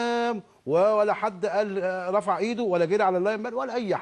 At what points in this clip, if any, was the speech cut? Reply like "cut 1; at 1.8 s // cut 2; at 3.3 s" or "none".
cut 1; at 2.0 s